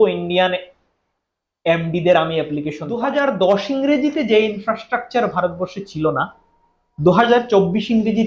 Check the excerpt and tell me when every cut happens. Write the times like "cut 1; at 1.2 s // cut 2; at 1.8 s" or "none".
cut 1; at 2.9 s